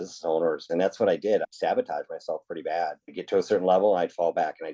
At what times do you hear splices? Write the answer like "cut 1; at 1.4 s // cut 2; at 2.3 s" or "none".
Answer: cut 1; at 1.5 s // cut 2; at 3.1 s